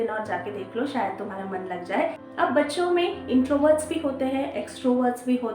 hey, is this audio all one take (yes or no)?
no